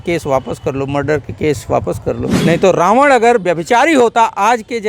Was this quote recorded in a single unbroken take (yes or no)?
no